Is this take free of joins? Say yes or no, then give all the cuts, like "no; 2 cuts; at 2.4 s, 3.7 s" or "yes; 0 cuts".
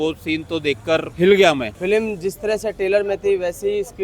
no; 2 cuts; at 1.1 s, 1.7 s